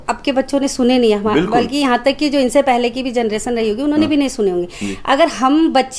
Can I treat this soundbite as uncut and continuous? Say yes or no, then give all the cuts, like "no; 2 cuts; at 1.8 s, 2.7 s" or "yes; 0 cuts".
yes; 0 cuts